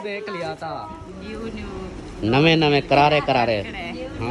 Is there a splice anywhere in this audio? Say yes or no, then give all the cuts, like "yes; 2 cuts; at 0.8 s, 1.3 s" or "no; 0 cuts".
yes; 1 cut; at 1.0 s